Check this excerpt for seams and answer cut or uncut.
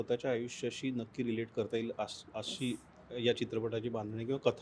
uncut